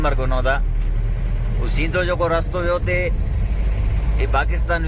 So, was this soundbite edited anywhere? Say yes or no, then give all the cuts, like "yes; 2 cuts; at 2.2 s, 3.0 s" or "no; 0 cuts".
no; 0 cuts